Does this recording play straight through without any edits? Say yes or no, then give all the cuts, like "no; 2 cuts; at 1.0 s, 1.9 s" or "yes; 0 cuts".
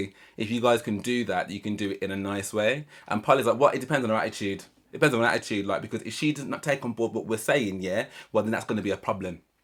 yes; 0 cuts